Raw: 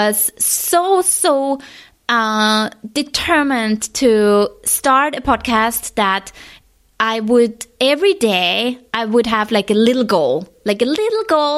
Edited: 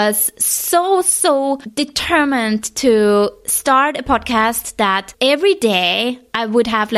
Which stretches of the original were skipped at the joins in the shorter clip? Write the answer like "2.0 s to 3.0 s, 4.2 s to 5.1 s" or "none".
1.7 s to 2.8 s, 6.3 s to 7.7 s